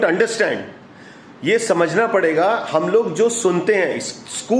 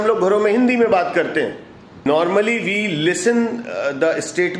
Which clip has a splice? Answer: second; 1 cut; at 2.1 s

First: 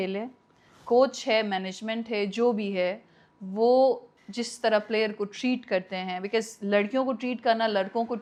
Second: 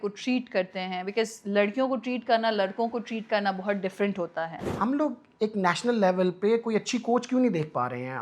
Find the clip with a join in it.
second; 1 cut; at 4.6 s

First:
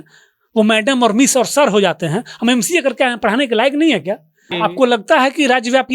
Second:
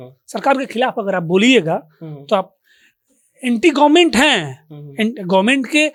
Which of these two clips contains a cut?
first; 1 cut; at 4.5 s

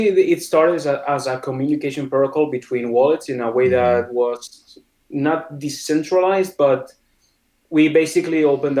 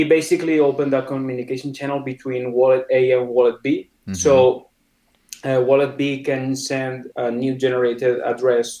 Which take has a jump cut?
second; 1 cut; at 7.1 s

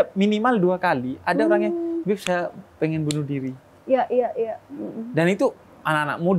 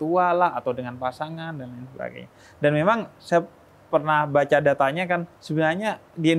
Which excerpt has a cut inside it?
second; 1 cut; at 5.4 s

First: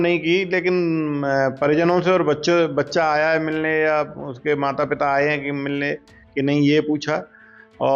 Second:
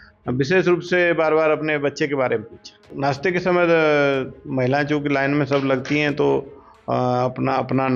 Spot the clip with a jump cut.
second; 1 cut; at 2.8 s

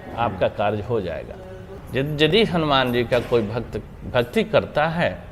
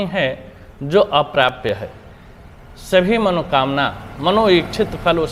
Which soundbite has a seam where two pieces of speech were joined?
first; 1 cut; at 1.8 s

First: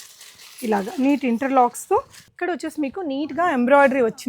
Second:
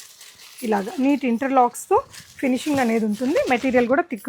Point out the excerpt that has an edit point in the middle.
first; 1 cut; at 2.3 s

